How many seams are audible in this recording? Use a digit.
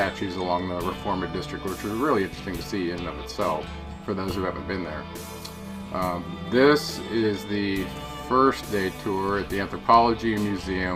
0